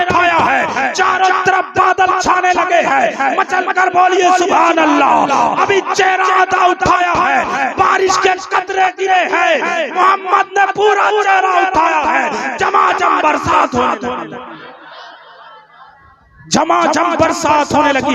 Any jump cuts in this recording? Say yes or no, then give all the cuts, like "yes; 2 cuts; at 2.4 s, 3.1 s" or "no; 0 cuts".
no; 0 cuts